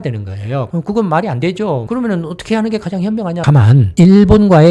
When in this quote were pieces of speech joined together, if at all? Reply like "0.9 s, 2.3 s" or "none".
1.9 s, 3.3 s